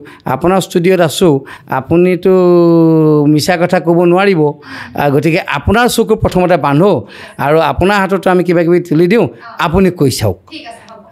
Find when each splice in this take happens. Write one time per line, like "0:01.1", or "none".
none